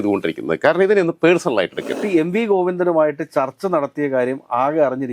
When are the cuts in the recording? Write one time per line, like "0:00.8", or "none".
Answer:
0:02.0